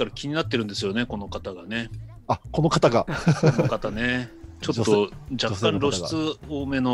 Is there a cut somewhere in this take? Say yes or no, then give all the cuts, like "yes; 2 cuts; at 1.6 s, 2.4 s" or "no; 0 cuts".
no; 0 cuts